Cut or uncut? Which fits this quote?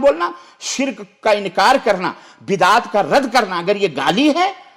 uncut